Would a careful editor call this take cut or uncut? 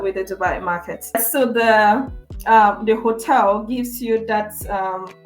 uncut